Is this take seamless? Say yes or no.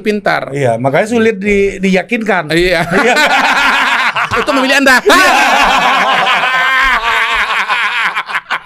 yes